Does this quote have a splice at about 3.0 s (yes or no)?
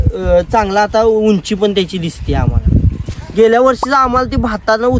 no